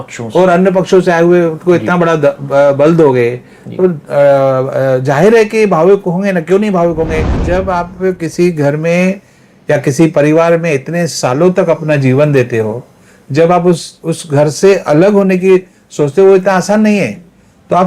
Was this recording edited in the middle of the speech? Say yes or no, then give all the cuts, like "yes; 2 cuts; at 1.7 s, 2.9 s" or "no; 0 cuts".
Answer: yes; 1 cut; at 7.4 s